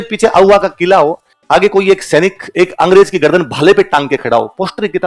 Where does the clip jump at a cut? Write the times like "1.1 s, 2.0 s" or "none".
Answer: none